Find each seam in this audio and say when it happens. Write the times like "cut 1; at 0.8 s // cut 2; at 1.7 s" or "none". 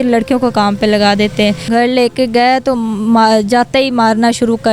cut 1; at 1.6 s